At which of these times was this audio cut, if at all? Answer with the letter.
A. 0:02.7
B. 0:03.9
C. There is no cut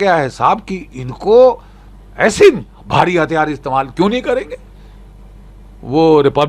A